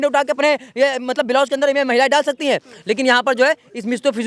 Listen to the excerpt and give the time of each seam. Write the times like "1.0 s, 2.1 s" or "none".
none